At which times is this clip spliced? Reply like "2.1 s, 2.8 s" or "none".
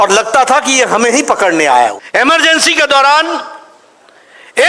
2.0 s